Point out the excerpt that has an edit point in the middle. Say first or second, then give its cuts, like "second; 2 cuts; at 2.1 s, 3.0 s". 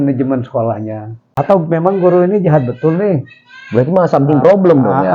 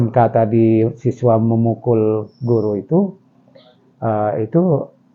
first; 1 cut; at 1.3 s